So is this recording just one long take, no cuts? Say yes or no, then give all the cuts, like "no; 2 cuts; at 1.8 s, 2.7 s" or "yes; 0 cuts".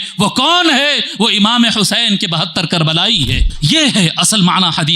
no; 1 cut; at 3.4 s